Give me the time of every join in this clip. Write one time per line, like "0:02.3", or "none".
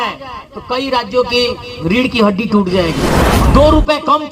0:03.2